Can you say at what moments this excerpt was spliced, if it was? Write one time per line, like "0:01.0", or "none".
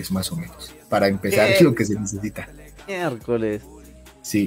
none